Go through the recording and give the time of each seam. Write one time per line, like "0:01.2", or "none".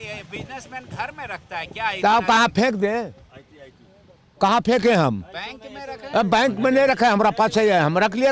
none